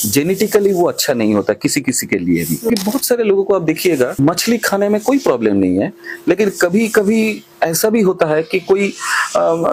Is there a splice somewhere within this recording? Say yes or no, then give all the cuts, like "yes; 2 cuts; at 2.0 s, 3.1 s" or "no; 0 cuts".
yes; 2 cuts; at 2.7 s, 4.1 s